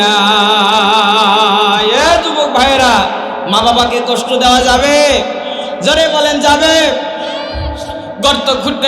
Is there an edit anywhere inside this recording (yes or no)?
yes